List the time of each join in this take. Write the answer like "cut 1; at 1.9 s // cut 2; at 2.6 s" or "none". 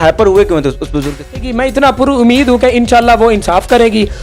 cut 1; at 1.4 s